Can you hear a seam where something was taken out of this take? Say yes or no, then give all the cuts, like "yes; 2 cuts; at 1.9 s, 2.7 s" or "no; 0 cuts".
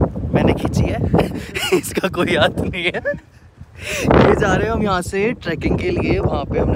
no; 0 cuts